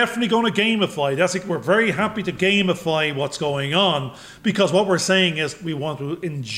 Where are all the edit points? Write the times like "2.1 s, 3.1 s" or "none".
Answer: none